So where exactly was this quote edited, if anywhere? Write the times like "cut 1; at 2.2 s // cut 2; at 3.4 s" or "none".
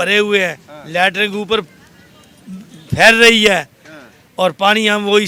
none